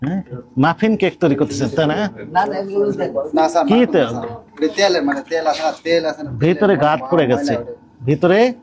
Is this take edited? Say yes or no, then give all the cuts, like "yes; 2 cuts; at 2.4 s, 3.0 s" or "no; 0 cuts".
no; 0 cuts